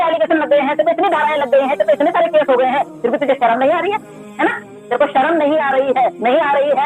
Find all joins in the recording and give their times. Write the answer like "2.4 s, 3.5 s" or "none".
none